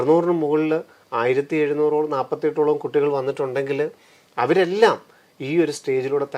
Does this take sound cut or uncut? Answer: uncut